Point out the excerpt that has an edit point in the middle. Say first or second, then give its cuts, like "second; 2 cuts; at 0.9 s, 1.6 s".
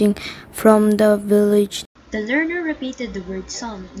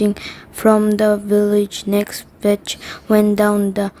second; 1 cut; at 1.8 s